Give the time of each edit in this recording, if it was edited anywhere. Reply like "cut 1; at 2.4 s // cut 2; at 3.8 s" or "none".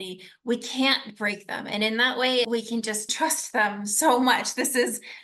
cut 1; at 3.1 s